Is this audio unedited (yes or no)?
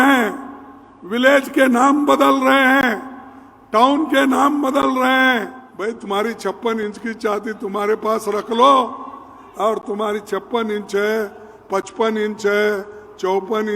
no